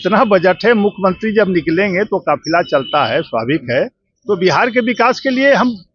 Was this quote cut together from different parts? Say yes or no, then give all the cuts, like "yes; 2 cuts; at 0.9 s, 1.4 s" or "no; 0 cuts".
no; 0 cuts